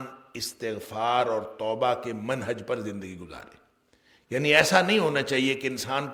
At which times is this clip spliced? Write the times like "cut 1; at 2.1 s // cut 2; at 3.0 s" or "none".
none